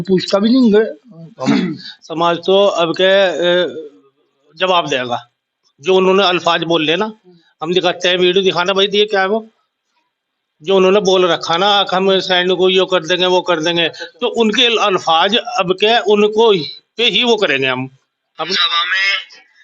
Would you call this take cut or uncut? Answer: cut